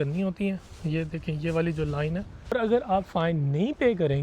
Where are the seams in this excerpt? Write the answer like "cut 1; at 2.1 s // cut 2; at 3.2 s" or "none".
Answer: cut 1; at 2.5 s

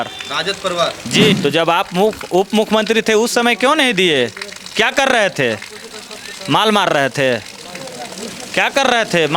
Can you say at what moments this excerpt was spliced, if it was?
cut 1; at 1.3 s

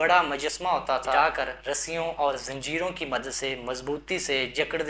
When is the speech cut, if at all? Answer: cut 1; at 1.1 s

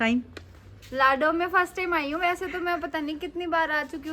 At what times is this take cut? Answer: none

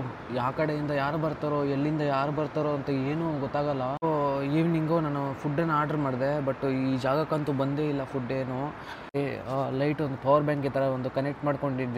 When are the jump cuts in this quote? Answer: cut 1; at 4.0 s // cut 2; at 9.1 s

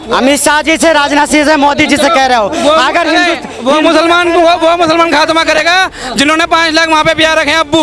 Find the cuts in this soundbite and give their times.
none

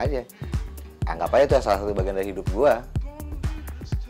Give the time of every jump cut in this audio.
cut 1; at 2.8 s

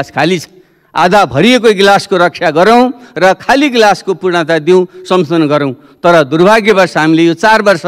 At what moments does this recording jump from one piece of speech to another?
none

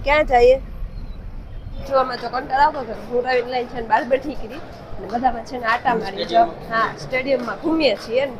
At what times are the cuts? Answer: cut 1; at 1.8 s

